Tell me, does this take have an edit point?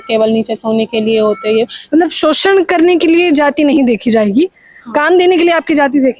yes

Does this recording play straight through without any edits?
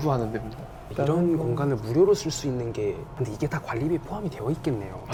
yes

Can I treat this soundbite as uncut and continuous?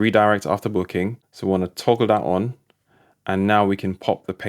no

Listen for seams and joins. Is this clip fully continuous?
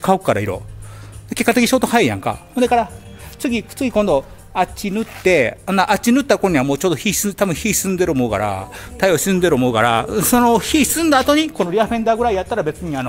no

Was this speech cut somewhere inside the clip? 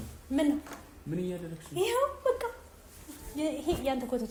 no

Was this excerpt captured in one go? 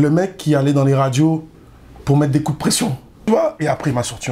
no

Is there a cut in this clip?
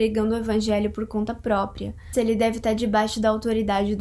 yes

